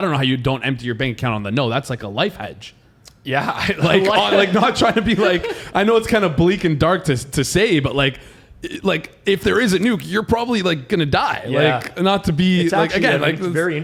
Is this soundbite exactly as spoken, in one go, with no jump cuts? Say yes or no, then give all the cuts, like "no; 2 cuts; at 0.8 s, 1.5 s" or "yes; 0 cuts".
yes; 0 cuts